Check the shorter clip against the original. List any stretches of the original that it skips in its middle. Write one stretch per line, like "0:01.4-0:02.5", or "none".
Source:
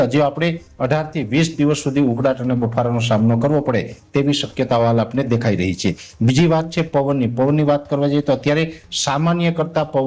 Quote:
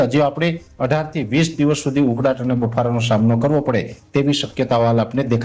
none

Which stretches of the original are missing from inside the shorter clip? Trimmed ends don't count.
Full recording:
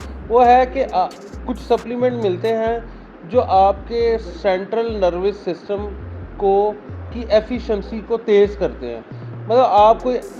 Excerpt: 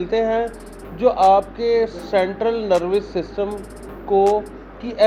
none

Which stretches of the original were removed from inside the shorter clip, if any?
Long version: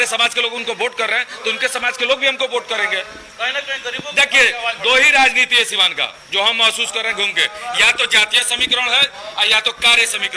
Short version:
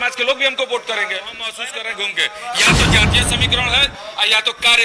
0:03.4-0:06.7

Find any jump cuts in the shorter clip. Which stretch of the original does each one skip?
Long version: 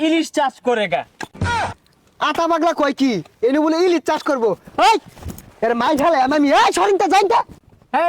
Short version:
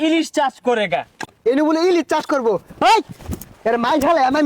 0:01.3-0:03.3

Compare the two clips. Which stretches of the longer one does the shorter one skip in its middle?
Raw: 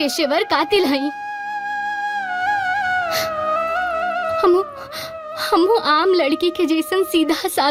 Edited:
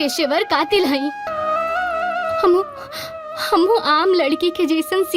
0:01.3-0:03.3

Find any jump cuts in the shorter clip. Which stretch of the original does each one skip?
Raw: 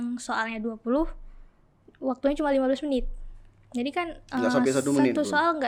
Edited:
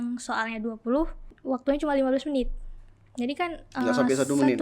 0:01.3-0:01.8

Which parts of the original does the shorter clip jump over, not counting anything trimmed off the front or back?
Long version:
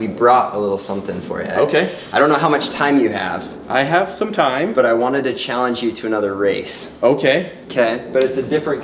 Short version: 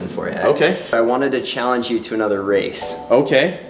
0:02.1-0:04.9

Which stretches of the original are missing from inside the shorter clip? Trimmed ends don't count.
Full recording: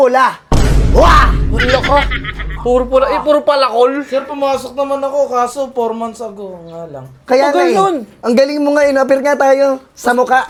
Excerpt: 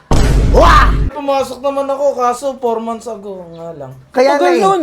0:01.5-0:04.3

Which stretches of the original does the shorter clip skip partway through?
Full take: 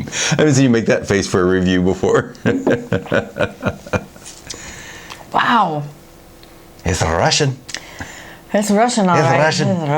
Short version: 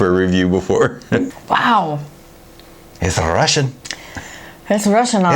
0:02.6-0:05.1

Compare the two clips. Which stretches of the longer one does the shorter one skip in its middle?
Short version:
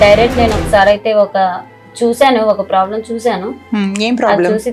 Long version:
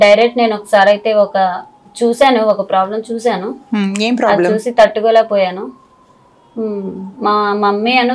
none

